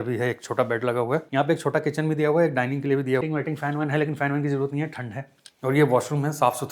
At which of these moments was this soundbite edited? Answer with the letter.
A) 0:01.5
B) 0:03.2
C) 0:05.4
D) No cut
B